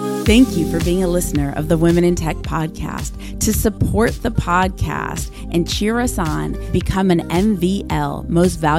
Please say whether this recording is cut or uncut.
uncut